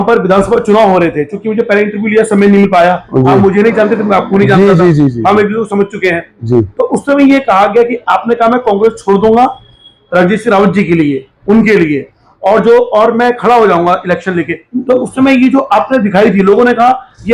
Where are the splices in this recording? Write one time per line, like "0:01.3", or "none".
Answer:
none